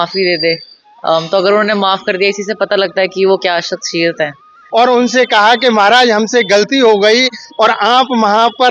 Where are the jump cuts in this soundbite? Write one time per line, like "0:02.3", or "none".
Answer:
0:04.5